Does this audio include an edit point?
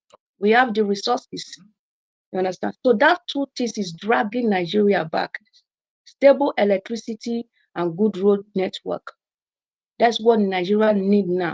no; 0 cuts

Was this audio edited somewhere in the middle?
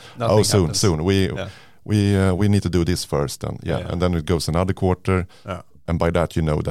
yes; 1 cut; at 5.8 s

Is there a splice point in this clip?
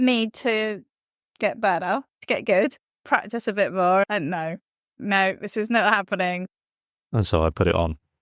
yes; 4 cuts; at 2.2 s, 3.0 s, 4.9 s, 6.5 s

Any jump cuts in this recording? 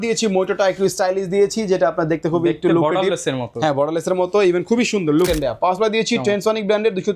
yes; 1 cut; at 5.3 s

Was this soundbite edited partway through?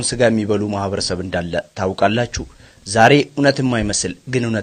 no; 0 cuts

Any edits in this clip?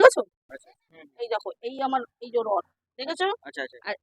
yes; 1 cut; at 0.9 s

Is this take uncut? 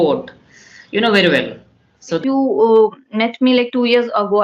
no; 1 cut; at 2.2 s

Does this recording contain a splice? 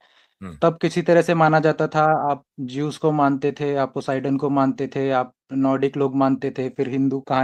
no; 0 cuts

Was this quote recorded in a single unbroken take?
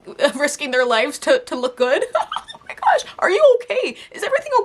yes; 0 cuts

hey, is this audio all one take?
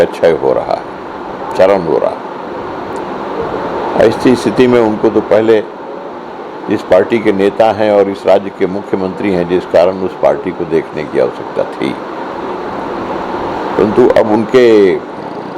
yes; 0 cuts

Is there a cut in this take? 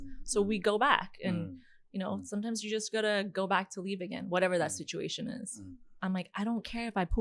yes; 1 cut; at 6.0 s

